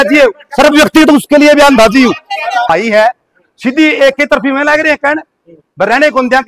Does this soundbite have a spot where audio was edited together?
yes; 1 cut; at 2.7 s

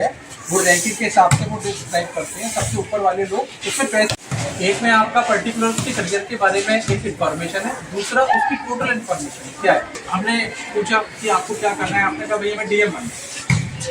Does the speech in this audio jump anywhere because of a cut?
no; 0 cuts

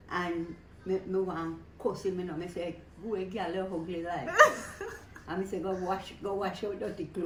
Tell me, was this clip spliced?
no; 0 cuts

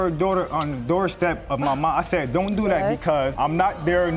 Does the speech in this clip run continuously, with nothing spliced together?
yes; 0 cuts

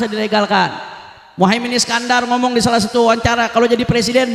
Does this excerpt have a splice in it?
no; 0 cuts

